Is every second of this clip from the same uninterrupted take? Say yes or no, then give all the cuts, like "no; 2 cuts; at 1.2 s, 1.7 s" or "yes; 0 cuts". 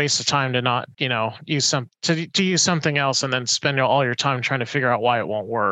no; 1 cut; at 0.9 s